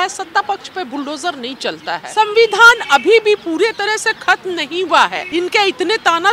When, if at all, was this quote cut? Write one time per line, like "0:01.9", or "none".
0:01.9
0:05.2